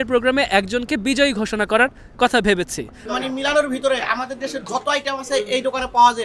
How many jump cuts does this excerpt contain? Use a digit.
1